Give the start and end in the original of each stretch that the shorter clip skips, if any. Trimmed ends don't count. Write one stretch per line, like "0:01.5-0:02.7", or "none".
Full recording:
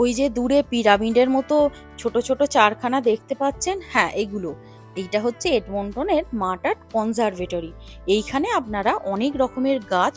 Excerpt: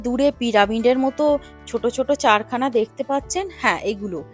none